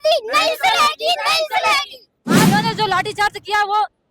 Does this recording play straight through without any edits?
no; 1 cut; at 2.5 s

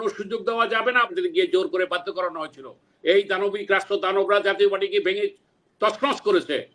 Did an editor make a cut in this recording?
yes; 1 cut; at 1.1 s

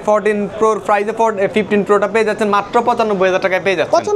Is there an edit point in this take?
no; 0 cuts

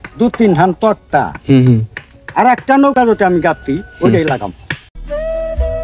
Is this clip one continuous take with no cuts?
yes; 0 cuts

